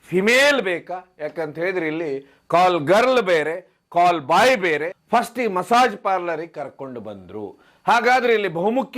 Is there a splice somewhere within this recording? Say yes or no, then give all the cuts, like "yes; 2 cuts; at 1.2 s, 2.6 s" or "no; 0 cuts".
yes; 1 cut; at 4.9 s